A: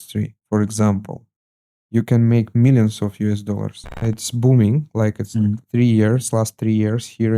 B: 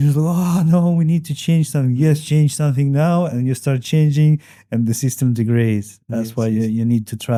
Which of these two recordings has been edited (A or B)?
A